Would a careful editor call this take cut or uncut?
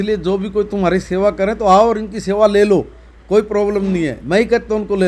uncut